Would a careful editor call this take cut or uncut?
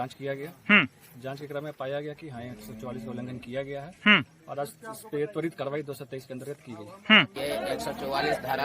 cut